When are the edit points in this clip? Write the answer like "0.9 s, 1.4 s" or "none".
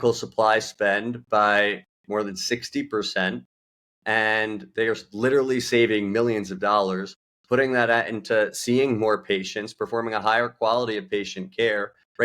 none